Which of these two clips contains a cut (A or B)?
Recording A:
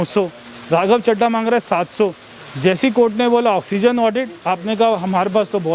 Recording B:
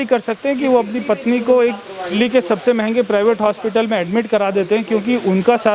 B